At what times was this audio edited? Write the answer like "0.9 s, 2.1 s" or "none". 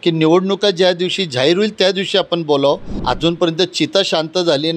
2.9 s